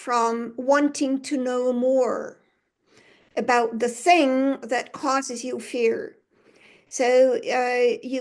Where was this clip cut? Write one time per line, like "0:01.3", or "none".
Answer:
none